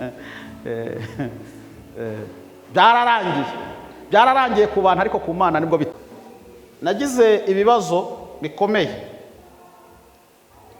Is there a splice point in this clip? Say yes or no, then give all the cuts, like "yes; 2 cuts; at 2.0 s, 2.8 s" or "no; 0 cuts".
yes; 1 cut; at 5.9 s